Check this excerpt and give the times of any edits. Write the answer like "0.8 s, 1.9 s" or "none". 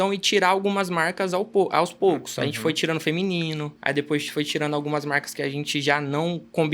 3.7 s